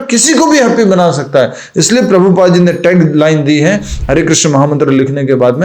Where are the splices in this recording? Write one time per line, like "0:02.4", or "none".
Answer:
none

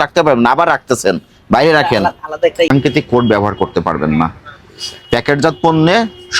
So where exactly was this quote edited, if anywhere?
0:02.7

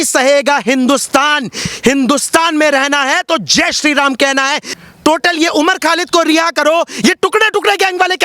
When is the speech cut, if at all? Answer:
0:04.7

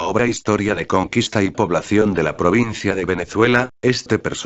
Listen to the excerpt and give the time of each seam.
none

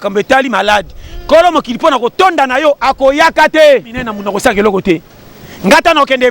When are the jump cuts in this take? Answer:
0:04.1

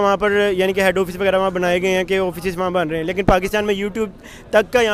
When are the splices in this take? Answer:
none

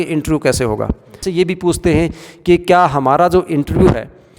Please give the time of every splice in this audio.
0:01.2

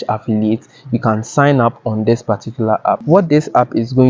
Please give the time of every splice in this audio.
0:03.0

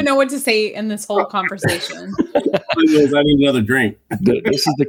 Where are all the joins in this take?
none

